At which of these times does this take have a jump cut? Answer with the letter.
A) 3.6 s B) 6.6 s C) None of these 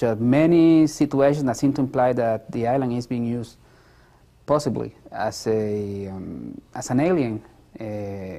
C